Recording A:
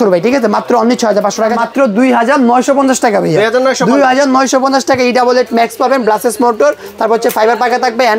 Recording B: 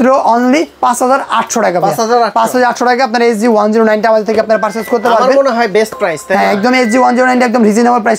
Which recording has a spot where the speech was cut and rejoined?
A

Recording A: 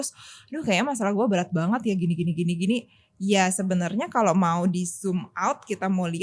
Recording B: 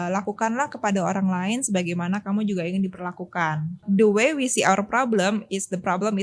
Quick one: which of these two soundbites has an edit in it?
B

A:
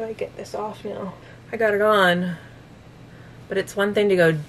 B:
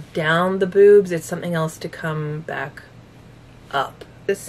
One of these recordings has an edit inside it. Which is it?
A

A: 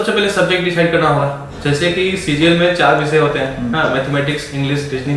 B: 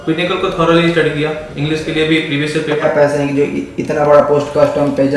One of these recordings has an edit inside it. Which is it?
B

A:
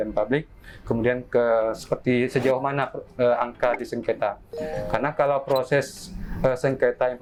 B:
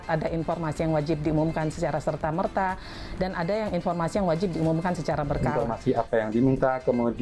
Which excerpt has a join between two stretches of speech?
B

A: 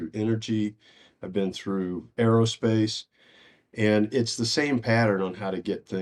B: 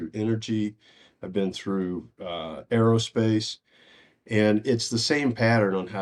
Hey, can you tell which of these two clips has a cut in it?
A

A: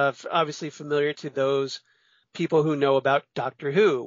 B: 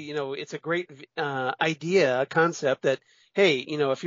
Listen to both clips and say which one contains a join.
A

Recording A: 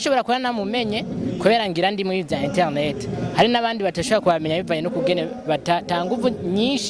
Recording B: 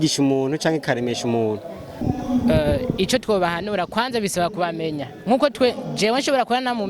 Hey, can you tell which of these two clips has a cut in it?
B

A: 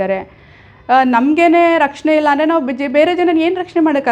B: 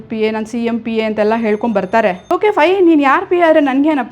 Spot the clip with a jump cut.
B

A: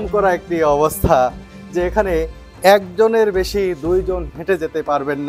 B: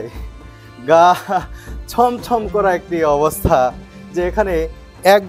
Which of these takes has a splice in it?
A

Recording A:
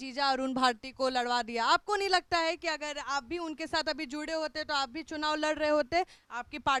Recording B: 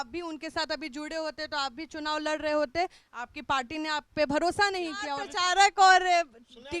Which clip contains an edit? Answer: B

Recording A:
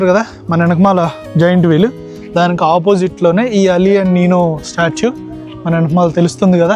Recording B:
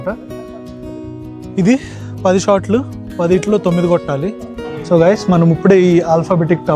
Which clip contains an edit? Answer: B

